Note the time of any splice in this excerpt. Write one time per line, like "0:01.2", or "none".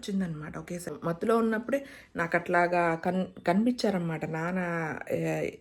0:00.9